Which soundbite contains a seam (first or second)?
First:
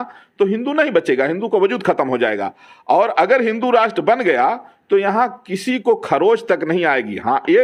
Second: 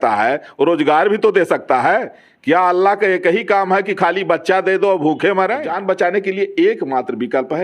second